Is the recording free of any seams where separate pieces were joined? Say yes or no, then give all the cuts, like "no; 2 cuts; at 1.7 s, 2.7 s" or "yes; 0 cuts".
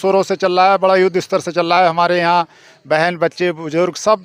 yes; 0 cuts